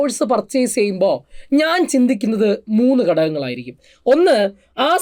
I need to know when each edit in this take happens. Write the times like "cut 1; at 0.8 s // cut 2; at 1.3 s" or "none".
none